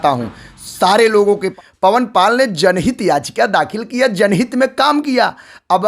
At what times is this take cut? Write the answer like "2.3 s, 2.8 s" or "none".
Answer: 1.5 s